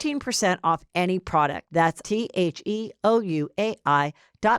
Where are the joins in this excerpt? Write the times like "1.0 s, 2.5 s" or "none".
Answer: 2.0 s